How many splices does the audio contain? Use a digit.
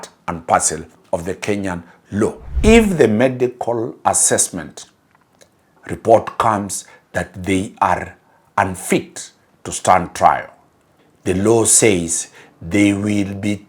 1